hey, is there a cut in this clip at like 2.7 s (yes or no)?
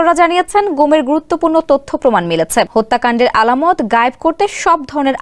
yes